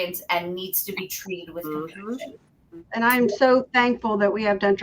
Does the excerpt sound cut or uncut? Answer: uncut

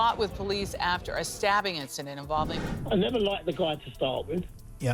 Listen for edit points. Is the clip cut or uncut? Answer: cut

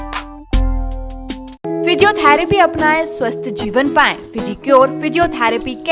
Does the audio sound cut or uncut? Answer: uncut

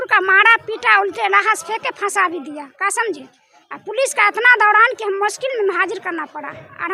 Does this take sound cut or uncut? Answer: uncut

